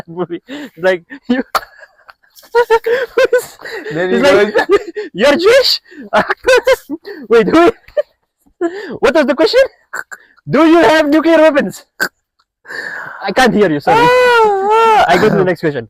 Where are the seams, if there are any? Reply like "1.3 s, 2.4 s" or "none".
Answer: none